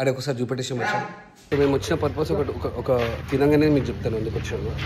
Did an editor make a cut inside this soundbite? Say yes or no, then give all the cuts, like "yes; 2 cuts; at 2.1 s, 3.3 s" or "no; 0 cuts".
yes; 1 cut; at 1.3 s